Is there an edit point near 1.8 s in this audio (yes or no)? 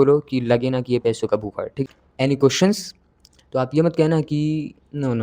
yes